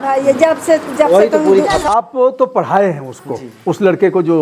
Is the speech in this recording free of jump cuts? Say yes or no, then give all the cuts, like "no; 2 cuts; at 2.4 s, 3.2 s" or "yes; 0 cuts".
no; 1 cut; at 1.8 s